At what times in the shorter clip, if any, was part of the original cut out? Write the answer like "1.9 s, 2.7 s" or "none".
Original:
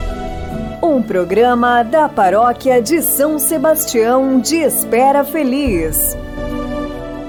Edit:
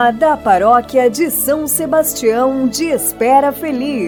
none